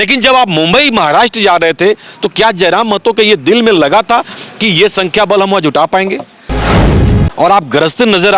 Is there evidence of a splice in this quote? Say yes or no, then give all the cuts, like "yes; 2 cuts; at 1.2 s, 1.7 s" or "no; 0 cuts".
yes; 1 cut; at 6.9 s